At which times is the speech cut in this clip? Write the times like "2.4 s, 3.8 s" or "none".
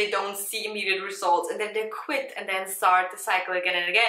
none